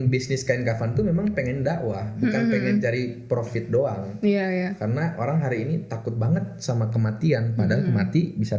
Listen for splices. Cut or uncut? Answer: uncut